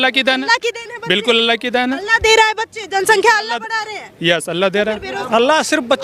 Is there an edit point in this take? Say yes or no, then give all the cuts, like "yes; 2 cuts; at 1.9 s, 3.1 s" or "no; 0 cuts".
yes; 1 cut; at 5.0 s